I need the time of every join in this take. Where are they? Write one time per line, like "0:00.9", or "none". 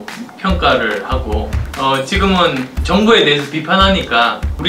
0:01.6

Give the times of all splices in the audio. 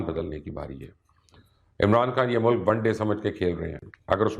none

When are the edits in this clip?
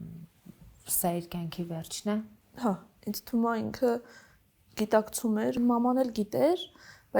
0:02.4
0:05.5

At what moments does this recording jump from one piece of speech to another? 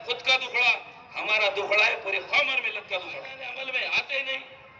0:03.4

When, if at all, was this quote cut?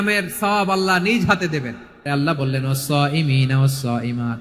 0:02.1

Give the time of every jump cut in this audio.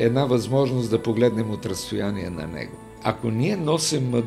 0:02.9

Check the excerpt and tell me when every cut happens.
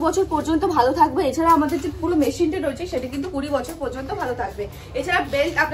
none

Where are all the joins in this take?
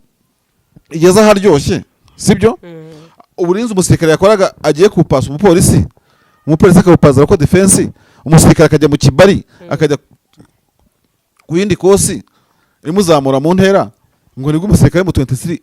none

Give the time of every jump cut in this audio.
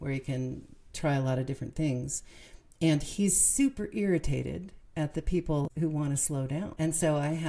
0:05.7
0:06.7

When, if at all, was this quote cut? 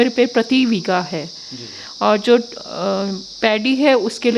none

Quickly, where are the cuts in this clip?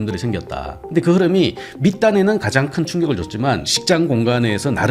0:03.7

